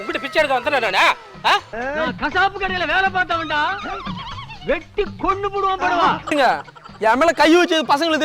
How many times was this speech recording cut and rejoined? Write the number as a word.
two